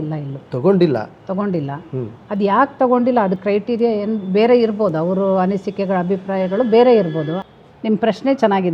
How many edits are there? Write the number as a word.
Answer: one